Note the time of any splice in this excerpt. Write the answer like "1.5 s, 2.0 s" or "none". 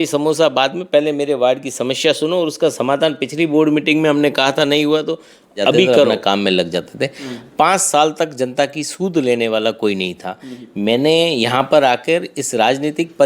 6.2 s